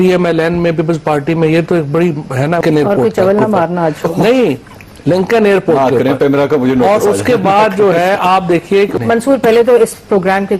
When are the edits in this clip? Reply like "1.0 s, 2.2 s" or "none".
2.6 s, 9.0 s